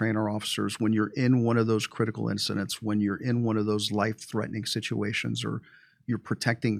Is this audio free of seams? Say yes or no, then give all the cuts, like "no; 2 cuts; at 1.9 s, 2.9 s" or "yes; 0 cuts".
yes; 0 cuts